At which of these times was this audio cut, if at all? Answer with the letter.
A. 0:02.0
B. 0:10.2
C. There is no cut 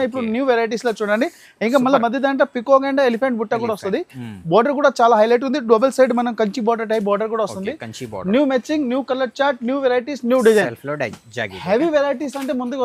C